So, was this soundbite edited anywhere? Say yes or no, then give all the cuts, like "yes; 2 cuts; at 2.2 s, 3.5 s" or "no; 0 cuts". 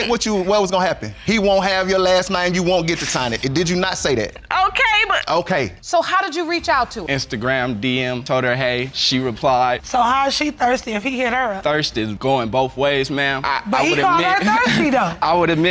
yes; 1 cut; at 5.8 s